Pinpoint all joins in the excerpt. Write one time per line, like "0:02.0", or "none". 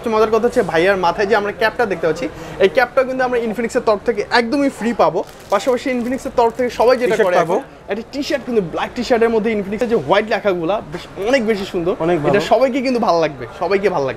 none